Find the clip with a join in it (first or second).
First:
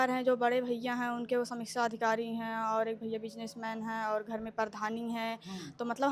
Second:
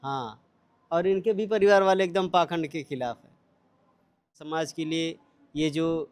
second